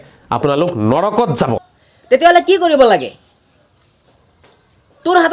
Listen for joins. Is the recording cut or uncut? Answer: uncut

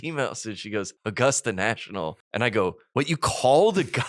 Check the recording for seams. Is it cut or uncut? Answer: cut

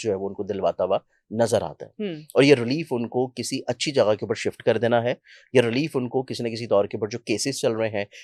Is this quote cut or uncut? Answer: uncut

